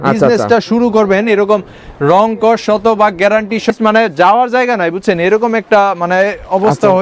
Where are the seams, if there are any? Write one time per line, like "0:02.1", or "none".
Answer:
0:03.7